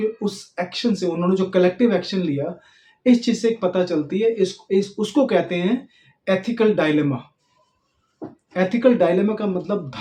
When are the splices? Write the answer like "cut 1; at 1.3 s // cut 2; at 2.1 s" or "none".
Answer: none